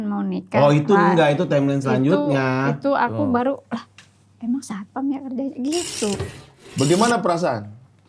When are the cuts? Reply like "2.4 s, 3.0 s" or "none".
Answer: 6.3 s